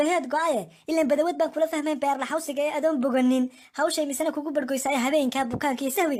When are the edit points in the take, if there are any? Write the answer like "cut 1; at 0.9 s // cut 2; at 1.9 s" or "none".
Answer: none